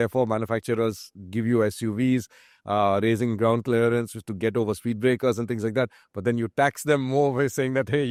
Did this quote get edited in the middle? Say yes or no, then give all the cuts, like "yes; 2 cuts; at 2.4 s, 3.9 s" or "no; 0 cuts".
no; 0 cuts